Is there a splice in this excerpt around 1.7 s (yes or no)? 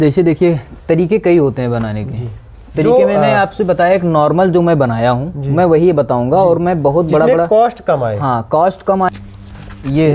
no